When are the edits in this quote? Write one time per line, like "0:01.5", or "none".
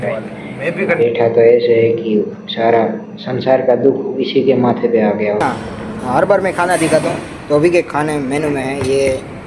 0:01.0
0:05.4